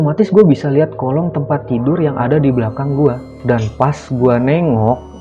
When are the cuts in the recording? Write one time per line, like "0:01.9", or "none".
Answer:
0:03.3